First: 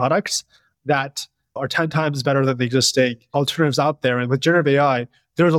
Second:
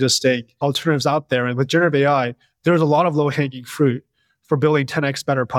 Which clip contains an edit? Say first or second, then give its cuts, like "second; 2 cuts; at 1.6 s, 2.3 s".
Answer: first; 1 cut; at 1.6 s